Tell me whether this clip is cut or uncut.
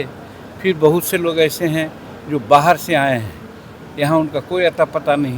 uncut